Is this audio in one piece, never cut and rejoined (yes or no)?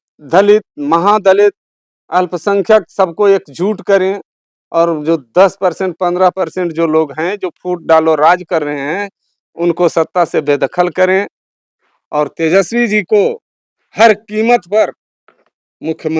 yes